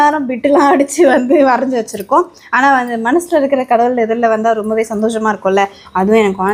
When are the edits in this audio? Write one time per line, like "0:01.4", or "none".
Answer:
none